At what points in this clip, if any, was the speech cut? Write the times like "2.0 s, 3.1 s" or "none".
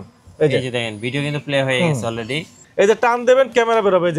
2.6 s